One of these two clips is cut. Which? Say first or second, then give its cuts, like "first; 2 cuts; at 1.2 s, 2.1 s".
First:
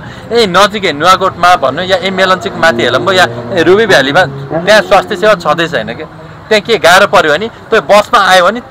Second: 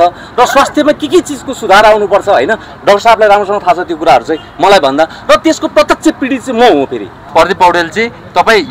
second; 1 cut; at 7.2 s